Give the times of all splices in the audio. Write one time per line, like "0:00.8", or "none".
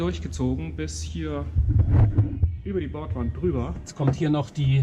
0:03.8